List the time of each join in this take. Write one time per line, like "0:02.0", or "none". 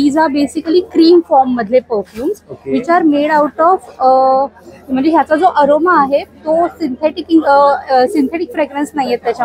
none